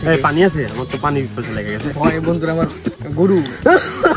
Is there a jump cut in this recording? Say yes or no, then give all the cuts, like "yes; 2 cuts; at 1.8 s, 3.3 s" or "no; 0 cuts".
no; 0 cuts